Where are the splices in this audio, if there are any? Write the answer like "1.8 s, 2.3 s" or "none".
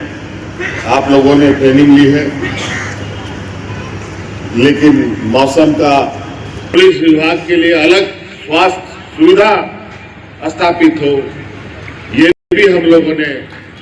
6.7 s

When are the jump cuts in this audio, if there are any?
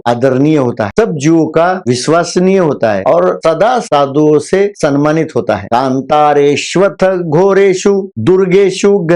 none

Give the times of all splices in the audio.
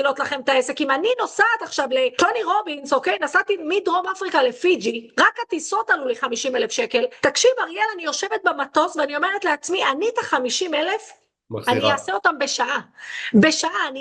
2.1 s, 7.1 s

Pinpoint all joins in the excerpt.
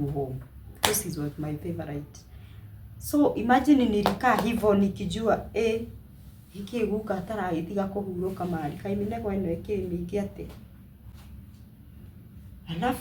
none

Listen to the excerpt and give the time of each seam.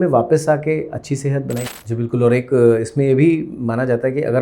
1.6 s

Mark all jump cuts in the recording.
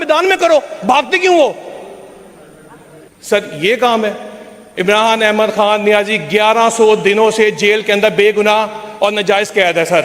none

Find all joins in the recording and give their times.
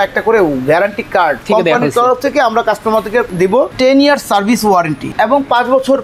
1.4 s, 3.3 s, 5.1 s

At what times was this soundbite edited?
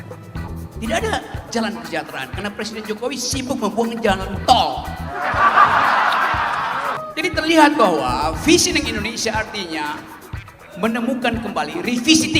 7.0 s

